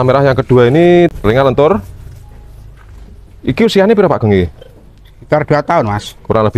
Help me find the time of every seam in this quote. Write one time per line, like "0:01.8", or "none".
0:01.1